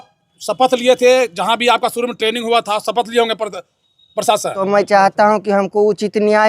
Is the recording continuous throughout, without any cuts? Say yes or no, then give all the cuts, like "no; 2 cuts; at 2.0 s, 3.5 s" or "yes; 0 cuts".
no; 1 cut; at 4.6 s